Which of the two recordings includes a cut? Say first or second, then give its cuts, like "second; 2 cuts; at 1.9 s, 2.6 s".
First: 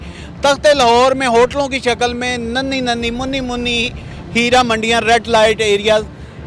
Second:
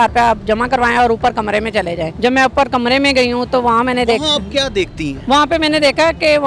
second; 2 cuts; at 2.1 s, 5.1 s